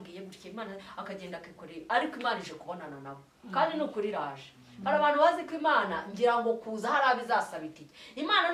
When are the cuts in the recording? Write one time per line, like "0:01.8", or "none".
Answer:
none